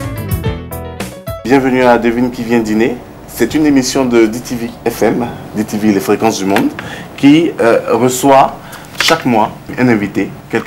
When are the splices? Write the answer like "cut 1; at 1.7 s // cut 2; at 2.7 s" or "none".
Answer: cut 1; at 1.3 s // cut 2; at 9.7 s